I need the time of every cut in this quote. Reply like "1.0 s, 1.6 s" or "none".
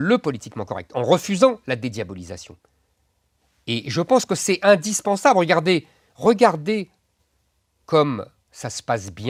none

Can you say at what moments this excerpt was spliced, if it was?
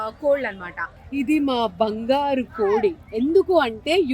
1.0 s

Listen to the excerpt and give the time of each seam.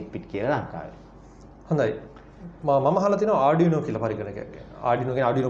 none

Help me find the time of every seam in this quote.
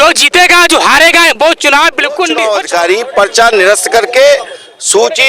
2.4 s

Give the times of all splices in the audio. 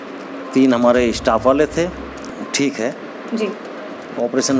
2.2 s

